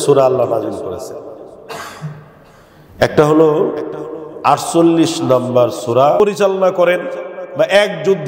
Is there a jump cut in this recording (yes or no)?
yes